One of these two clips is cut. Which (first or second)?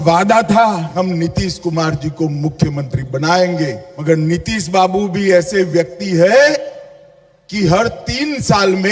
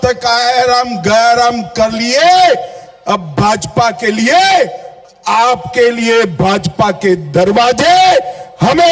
first